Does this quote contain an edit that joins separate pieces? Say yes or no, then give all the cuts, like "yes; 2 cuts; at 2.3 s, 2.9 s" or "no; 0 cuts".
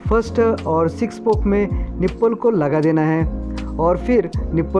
no; 0 cuts